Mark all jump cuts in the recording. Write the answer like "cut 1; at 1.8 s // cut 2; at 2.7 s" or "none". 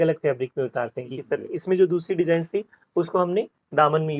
cut 1; at 1.1 s

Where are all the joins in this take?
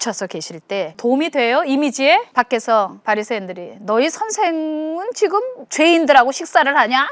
cut 1; at 0.9 s // cut 2; at 2.3 s // cut 3; at 3.0 s // cut 4; at 5.6 s

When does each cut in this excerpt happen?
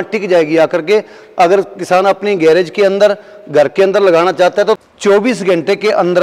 cut 1; at 4.8 s

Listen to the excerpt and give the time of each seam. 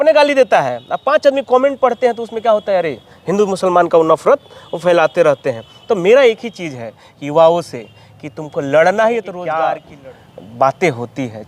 cut 1; at 9.3 s

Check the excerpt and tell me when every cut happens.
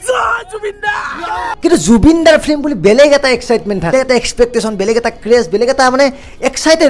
cut 1; at 1.5 s // cut 2; at 3.9 s

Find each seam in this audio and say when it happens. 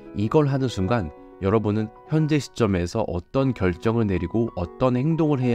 none

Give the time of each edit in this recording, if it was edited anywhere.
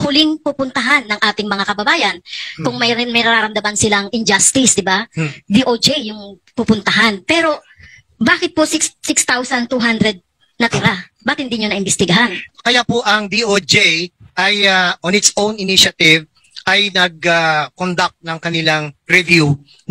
cut 1; at 12.5 s

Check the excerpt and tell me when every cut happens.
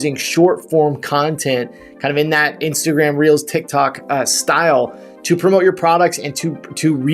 none

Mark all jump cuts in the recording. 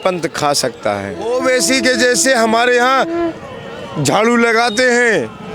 cut 1; at 1.3 s

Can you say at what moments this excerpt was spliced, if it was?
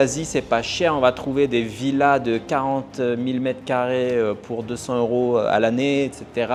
none

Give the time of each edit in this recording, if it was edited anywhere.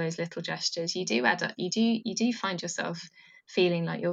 none

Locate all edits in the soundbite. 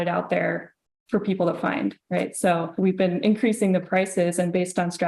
cut 1; at 2.7 s

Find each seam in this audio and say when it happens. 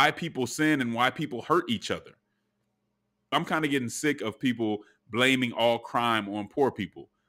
cut 1; at 3.3 s

